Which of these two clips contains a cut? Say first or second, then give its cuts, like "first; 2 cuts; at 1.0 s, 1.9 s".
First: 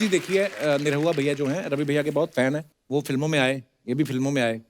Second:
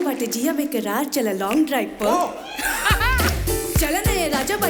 first; 1 cut; at 2.7 s